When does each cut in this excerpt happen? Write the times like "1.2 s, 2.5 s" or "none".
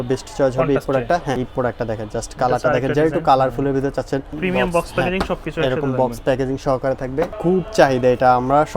1.4 s, 4.4 s, 7.3 s